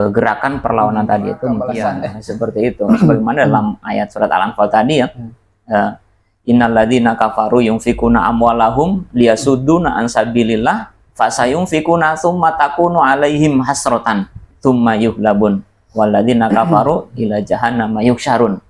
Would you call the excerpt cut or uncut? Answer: cut